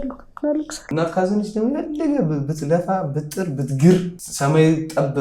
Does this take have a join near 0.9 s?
yes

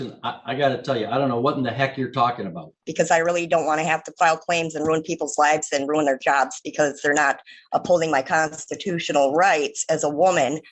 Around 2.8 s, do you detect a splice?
yes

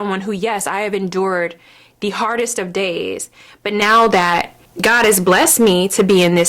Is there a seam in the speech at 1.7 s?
no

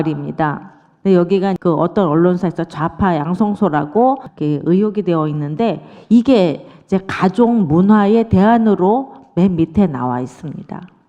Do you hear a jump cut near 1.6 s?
yes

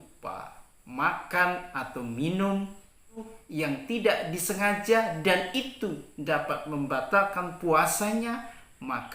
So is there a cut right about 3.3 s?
yes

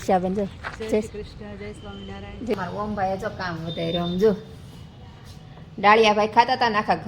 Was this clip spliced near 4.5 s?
no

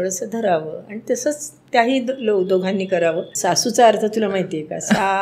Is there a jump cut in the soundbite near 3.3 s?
yes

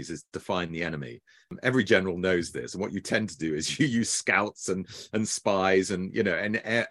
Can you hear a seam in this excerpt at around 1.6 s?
yes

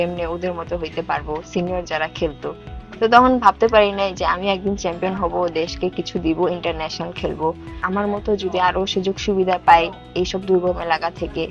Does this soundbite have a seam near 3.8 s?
no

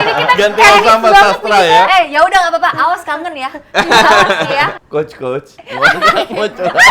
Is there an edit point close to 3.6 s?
no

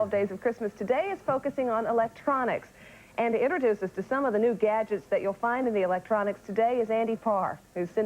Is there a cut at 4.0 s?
no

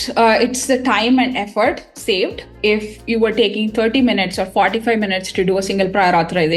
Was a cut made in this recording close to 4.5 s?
no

